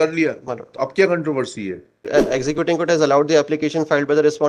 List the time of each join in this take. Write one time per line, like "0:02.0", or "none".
0:02.1